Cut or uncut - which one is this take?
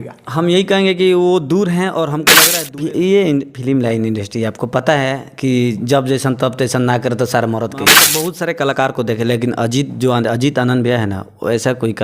cut